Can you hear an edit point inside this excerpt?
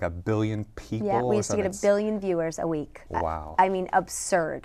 no; 0 cuts

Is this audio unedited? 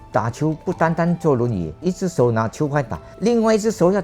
no; 2 cuts; at 1.8 s, 3.0 s

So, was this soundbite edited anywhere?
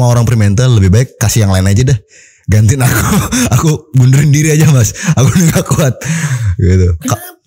no; 0 cuts

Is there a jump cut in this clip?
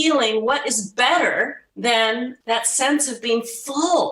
yes; 2 cuts; at 1.6 s, 2.4 s

